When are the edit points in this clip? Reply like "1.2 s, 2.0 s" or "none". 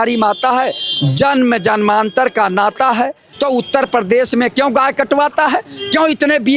3.3 s